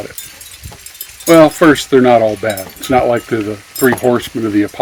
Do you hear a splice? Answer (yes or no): no